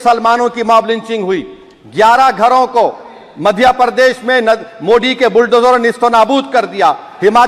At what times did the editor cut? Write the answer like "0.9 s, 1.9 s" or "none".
none